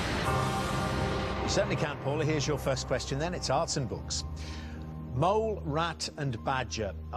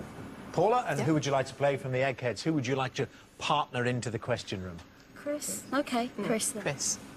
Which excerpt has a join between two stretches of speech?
first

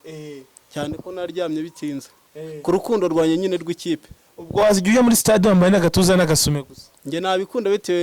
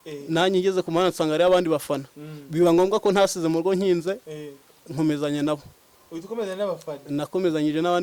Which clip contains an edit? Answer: first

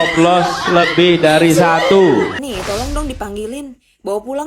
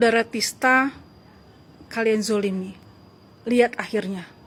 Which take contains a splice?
first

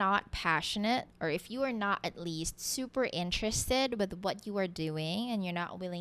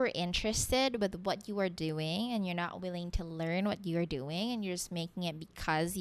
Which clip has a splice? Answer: first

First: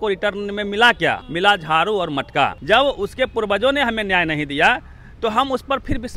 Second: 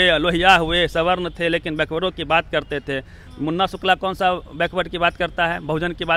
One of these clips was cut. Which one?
first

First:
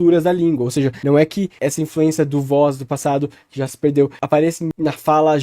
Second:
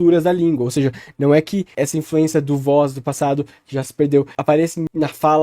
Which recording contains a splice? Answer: first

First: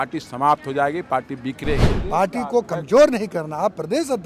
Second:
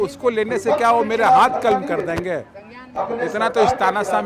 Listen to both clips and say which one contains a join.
first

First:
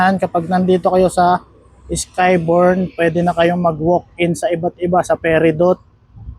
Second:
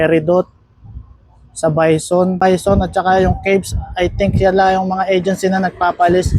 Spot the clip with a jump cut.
second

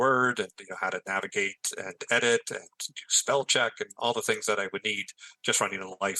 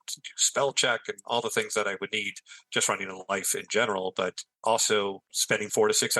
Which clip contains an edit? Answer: second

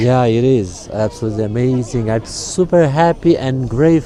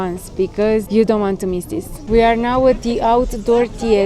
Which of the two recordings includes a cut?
second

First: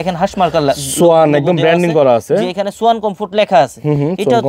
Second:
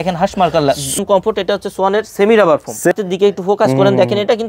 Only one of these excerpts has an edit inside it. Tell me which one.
second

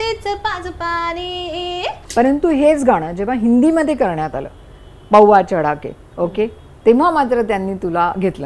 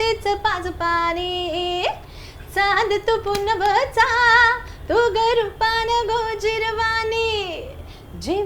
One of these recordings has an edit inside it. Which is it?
first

